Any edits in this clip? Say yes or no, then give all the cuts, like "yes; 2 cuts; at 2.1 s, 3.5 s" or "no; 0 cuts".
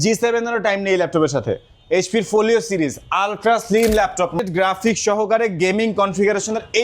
yes; 1 cut; at 4.4 s